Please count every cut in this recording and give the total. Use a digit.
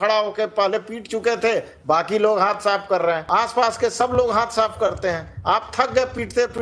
1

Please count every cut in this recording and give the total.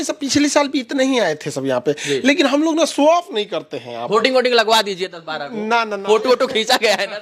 0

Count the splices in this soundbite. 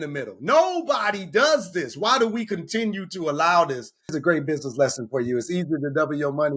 1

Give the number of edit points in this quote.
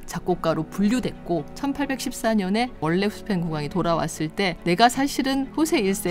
2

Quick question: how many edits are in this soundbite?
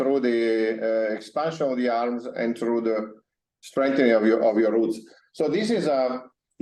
0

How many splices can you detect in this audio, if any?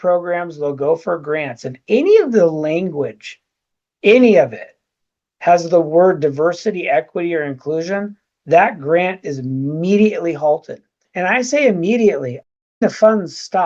1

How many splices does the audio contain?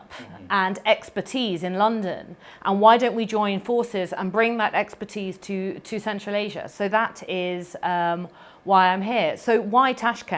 0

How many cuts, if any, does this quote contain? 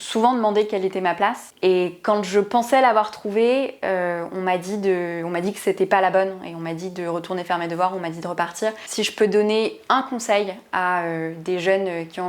2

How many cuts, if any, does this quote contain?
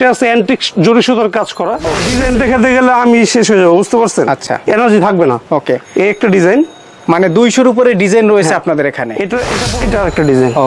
2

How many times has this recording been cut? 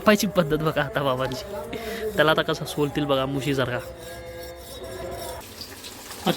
1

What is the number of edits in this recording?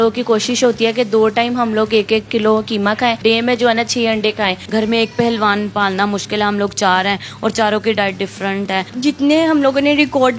3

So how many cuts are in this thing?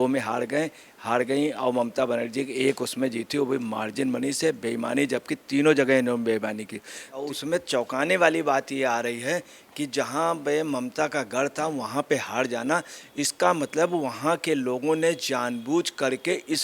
1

